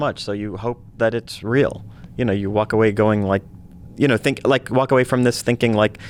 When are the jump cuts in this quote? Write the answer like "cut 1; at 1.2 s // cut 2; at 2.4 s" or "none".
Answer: none

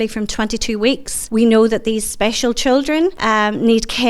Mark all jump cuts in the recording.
cut 1; at 1.1 s // cut 2; at 3.2 s

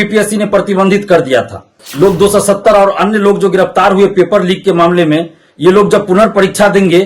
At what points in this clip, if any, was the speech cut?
cut 1; at 1.8 s

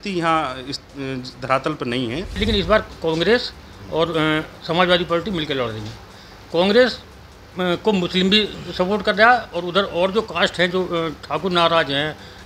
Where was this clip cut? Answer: cut 1; at 2.4 s

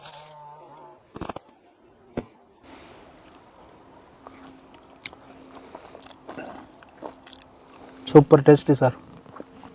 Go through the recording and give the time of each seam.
cut 1; at 2.6 s

